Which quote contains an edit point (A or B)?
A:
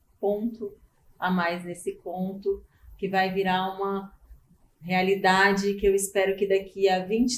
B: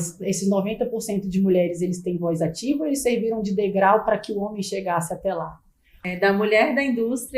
B